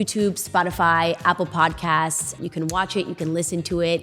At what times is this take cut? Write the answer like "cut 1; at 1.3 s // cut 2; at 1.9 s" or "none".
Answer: cut 1; at 2.4 s